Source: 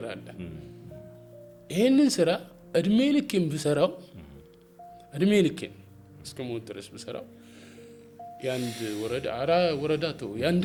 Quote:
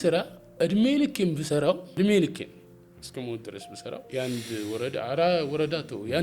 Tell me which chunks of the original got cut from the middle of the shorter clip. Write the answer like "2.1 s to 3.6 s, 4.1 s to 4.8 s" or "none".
4.0 s to 5.1 s, 7.3 s to 8.4 s